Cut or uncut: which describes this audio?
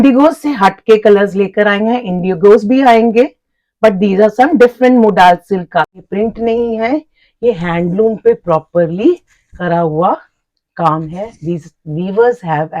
cut